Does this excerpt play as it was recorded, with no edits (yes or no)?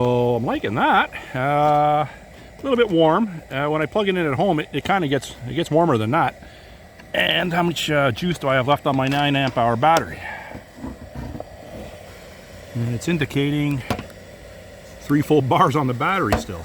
no